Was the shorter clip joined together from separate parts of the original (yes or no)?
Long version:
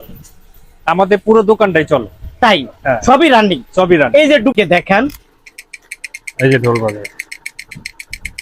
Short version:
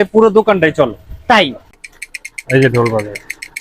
yes